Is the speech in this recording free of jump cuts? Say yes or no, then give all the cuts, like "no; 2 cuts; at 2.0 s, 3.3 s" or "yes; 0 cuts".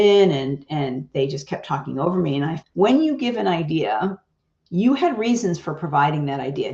no; 1 cut; at 2.6 s